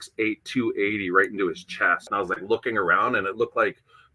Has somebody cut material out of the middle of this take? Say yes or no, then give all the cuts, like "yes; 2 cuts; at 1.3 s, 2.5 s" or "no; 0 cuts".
yes; 1 cut; at 2.1 s